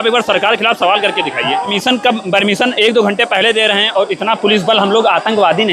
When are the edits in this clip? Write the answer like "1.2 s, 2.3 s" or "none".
1.7 s

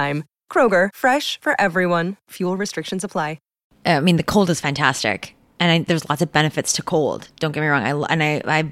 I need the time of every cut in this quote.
3.7 s

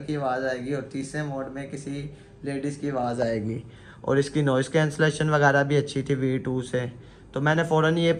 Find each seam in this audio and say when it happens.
none

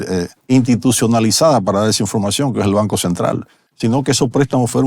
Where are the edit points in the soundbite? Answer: 3.6 s

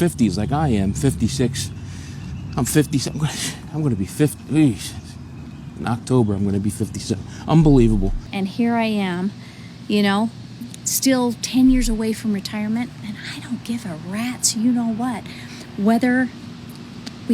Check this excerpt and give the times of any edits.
8.4 s

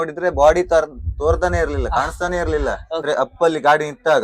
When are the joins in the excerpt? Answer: 3.0 s

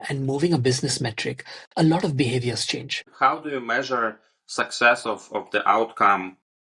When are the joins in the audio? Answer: 3.1 s

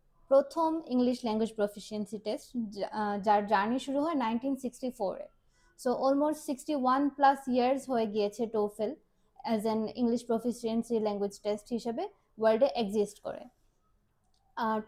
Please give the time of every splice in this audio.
none

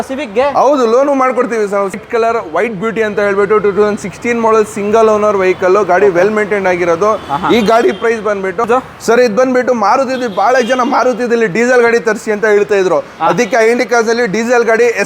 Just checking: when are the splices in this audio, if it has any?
1.9 s, 8.6 s

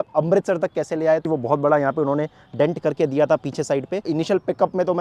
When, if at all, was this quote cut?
1.2 s, 4.0 s

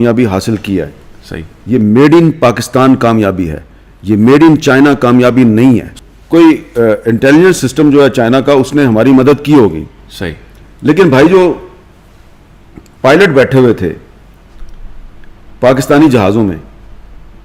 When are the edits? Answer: 5.9 s

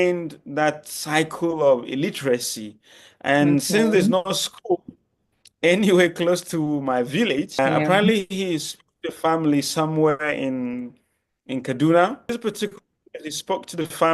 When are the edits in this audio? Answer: 7.6 s, 12.3 s

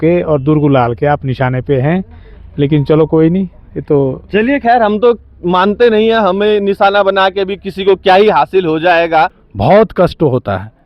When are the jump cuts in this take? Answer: 9.4 s

